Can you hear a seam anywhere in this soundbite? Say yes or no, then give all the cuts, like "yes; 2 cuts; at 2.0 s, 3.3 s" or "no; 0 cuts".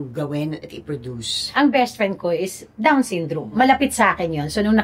yes; 2 cuts; at 1.4 s, 3.5 s